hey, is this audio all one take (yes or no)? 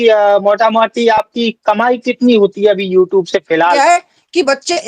no